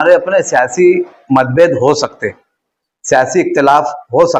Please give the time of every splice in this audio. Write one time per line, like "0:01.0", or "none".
none